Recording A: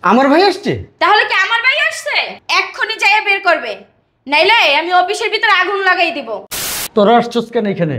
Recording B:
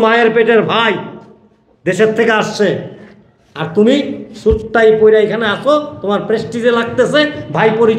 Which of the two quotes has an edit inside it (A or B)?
A